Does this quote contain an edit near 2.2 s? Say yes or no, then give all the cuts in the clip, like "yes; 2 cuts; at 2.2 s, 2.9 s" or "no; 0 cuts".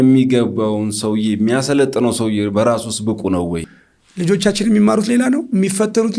no; 1 cut; at 3.7 s